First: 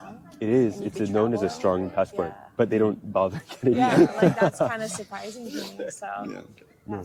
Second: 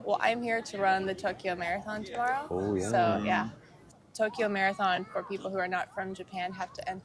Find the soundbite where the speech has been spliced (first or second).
second